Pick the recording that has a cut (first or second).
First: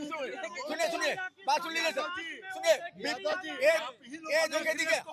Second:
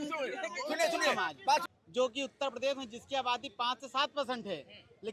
second